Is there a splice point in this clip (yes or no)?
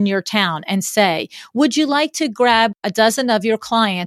yes